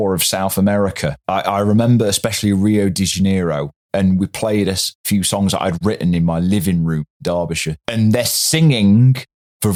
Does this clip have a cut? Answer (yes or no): no